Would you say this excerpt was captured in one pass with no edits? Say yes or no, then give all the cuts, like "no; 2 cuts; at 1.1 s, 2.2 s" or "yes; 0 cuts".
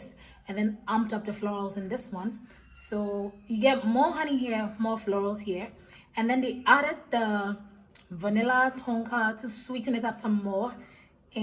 yes; 0 cuts